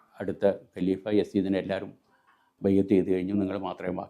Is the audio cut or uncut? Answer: uncut